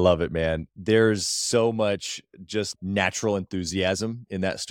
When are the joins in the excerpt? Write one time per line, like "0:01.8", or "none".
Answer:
0:02.7